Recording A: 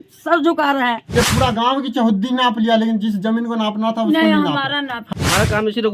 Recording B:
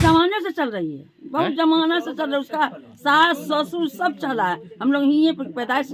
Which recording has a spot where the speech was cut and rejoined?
A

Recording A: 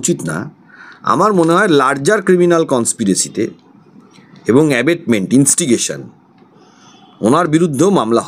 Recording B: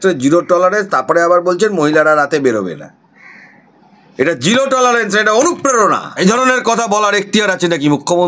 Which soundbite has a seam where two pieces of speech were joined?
B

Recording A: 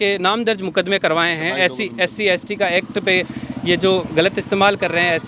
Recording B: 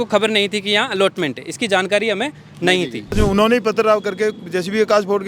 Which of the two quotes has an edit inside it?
B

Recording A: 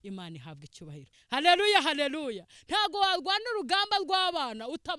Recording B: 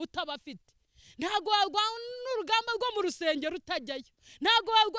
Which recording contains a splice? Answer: A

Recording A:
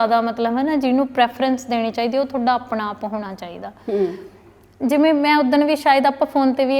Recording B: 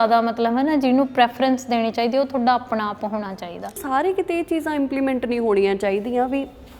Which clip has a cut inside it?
B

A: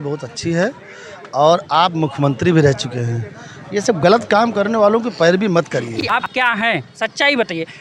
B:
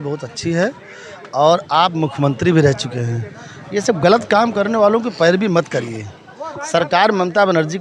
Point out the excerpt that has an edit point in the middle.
A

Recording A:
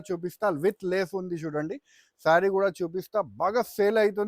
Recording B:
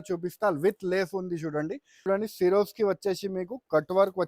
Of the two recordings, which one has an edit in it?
B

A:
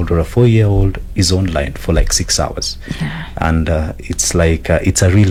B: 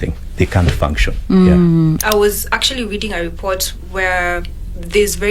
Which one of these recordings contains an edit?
B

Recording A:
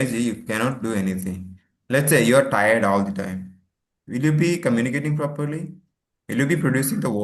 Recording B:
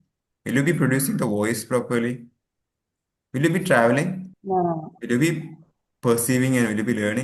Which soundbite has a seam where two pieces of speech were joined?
B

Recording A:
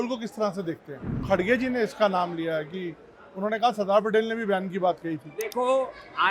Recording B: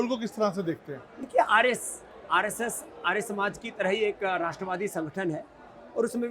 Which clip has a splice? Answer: A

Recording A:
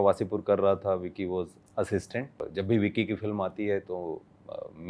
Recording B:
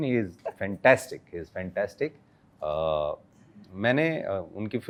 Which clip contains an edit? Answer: A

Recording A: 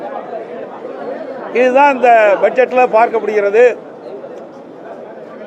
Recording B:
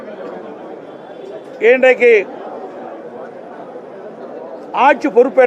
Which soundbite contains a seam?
A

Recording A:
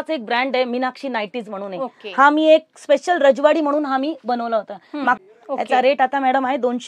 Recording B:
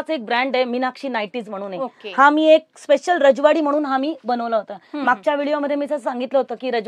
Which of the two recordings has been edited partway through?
A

